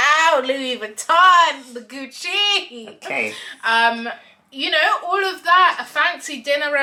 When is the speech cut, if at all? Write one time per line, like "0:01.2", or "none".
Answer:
none